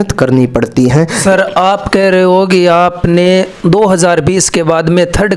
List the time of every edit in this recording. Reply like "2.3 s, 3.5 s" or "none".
1.2 s